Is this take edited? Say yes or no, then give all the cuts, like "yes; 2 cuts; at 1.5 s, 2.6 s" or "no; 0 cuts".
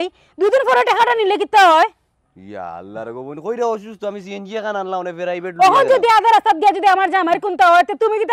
no; 0 cuts